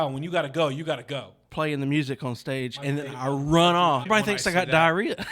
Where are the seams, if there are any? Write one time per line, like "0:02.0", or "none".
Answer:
0:01.4
0:04.0